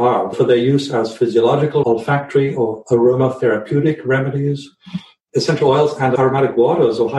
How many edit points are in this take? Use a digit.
2